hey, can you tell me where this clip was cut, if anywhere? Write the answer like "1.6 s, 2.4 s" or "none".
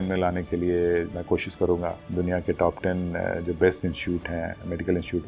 none